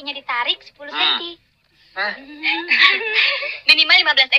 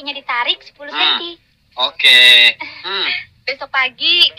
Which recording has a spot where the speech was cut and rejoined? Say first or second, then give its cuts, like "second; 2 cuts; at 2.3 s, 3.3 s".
second; 2 cuts; at 1.6 s, 2.9 s